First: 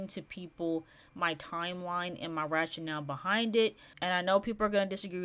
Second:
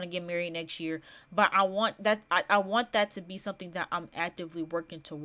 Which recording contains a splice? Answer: first; 1 cut; at 3.9 s

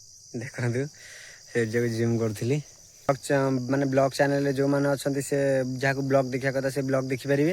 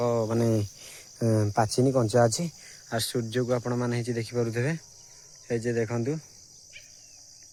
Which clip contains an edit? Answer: first; 1 cut; at 3.1 s

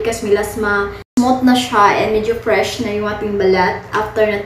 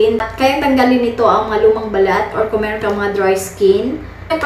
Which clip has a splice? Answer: first; 1 cut; at 1.1 s

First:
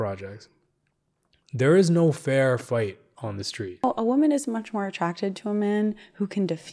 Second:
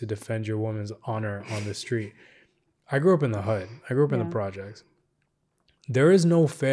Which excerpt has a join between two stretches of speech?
first; 1 cut; at 3.8 s

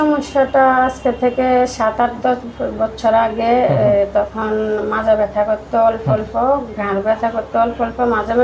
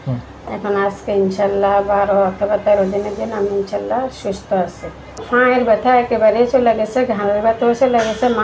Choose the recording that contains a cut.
second; 1 cut; at 5.2 s

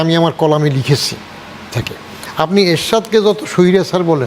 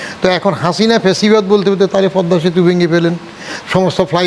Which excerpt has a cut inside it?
first; 1 cut; at 1.7 s

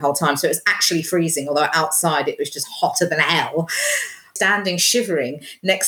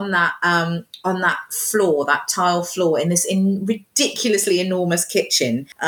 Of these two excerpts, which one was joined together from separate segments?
first; 1 cut; at 4.3 s

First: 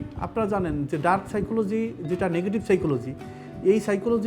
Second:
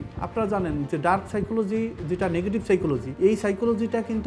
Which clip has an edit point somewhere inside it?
second; 1 cut; at 3.1 s

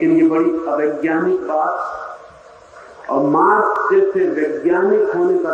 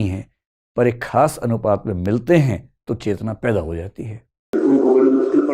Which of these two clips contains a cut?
second; 1 cut; at 4.5 s

